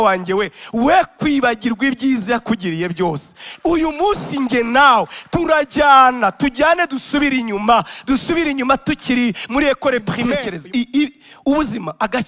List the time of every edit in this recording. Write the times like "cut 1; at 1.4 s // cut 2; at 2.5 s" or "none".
cut 1; at 10.5 s